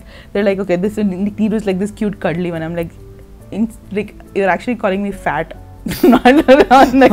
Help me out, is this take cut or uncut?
uncut